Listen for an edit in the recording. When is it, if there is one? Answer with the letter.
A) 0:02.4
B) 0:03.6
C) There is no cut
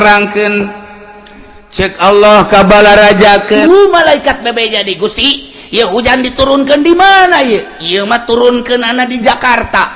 B